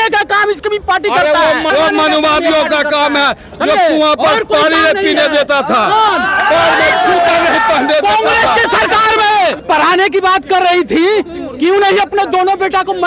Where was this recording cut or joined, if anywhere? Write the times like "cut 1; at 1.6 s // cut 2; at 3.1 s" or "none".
cut 1; at 1.7 s // cut 2; at 9.6 s